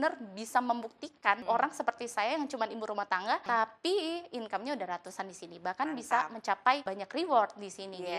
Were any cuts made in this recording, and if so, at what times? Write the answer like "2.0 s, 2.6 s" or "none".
1.4 s, 3.4 s, 7.0 s

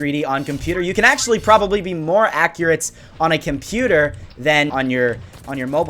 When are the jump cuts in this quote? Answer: 4.7 s

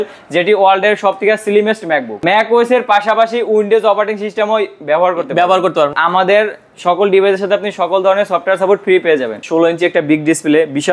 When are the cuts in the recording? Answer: 2.2 s, 5.9 s, 9.4 s

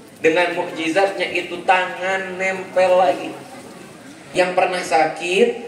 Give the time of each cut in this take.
4.3 s

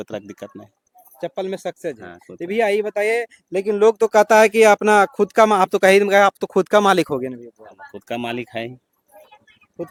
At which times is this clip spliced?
none

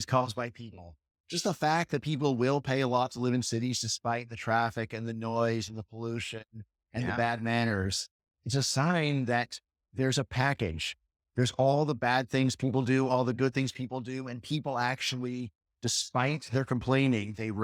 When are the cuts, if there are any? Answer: none

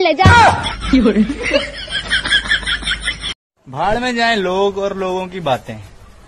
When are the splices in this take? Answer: 3.3 s

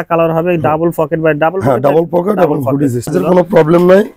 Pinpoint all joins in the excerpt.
3.1 s

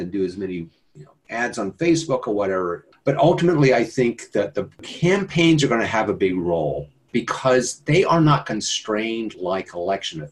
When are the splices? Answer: 2.9 s, 4.9 s, 7.1 s

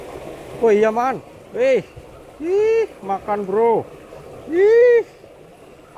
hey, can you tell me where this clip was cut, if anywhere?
none

